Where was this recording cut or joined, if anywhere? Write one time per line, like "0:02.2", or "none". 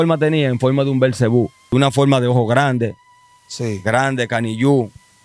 0:01.7